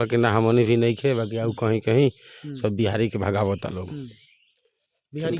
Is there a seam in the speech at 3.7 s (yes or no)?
no